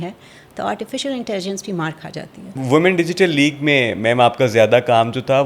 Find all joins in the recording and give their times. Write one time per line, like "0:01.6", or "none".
0:02.5

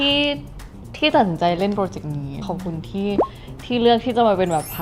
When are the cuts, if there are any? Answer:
0:02.4

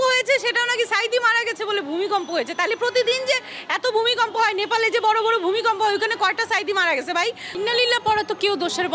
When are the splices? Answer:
0:07.5

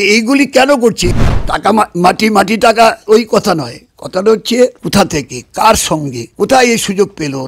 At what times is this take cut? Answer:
0:01.1
0:03.0
0:04.8
0:06.2

